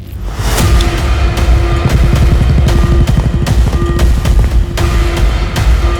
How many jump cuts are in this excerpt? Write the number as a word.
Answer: zero